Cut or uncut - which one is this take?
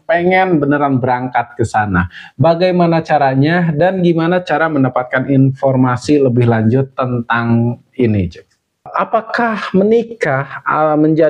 cut